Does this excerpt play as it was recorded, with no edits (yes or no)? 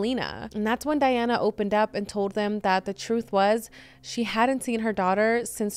yes